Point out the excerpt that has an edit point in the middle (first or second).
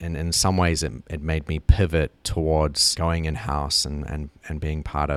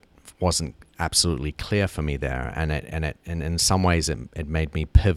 first